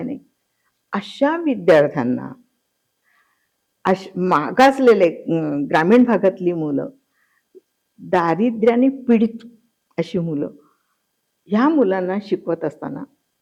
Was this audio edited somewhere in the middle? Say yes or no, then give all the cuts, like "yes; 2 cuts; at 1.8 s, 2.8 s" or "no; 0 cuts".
no; 0 cuts